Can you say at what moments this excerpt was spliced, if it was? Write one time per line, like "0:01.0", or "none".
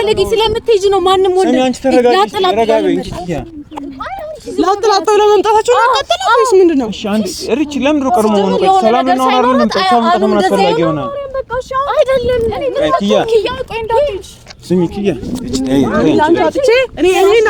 none